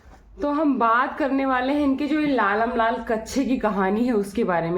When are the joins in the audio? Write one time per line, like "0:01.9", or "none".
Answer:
none